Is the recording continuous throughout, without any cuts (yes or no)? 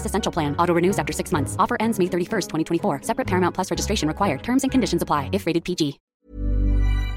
no